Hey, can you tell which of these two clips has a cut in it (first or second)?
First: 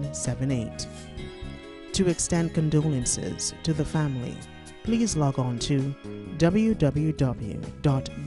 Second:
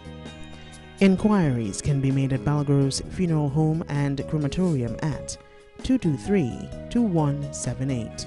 second